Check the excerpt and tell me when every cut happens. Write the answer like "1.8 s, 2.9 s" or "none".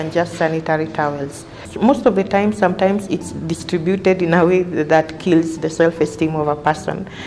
none